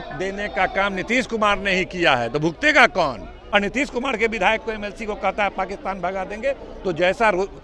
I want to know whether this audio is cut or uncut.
cut